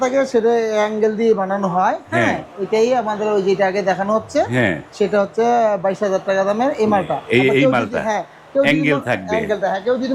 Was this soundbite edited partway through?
no; 0 cuts

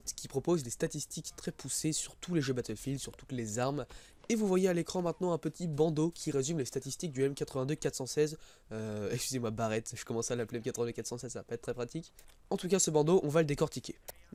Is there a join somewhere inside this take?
no; 0 cuts

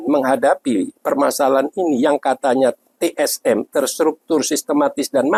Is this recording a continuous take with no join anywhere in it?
yes; 0 cuts

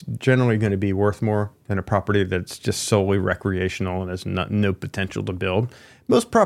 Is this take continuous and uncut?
yes; 0 cuts

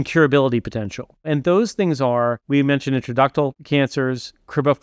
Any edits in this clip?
yes; 2 cuts; at 2.4 s, 3.6 s

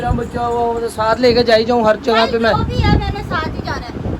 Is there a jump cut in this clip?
yes; 1 cut; at 1.1 s

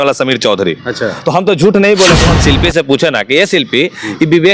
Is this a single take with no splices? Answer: no; 1 cut; at 2.3 s

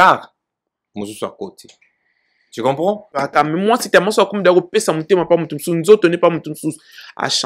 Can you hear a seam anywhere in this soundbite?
yes; 1 cut; at 3.2 s

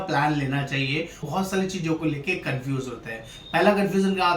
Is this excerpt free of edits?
no; 1 cut; at 1.3 s

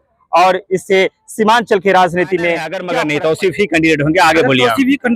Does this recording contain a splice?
yes; 1 cut; at 2.8 s

